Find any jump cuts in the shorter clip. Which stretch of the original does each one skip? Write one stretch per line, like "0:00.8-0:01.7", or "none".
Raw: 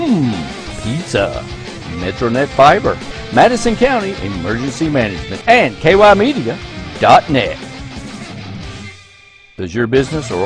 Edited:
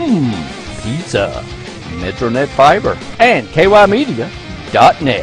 0:03.1-0:05.3